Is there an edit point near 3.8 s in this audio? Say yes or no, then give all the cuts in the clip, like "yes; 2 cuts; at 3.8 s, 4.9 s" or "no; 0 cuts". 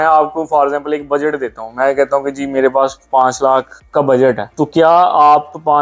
yes; 2 cuts; at 3.8 s, 4.5 s